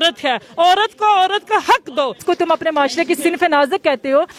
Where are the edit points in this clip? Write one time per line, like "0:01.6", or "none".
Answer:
0:02.2